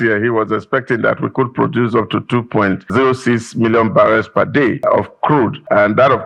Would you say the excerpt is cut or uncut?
cut